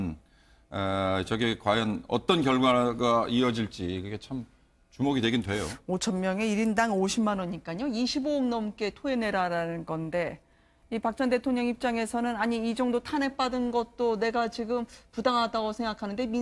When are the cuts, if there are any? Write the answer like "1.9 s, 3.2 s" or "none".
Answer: 9.4 s